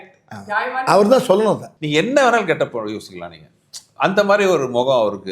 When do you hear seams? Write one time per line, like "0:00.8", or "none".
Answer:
0:01.7